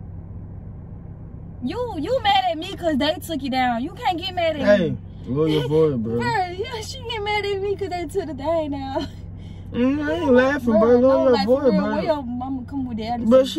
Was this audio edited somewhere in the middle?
no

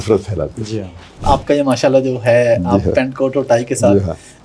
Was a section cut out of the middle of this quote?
yes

